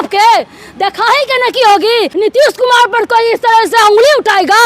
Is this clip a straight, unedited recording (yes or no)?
no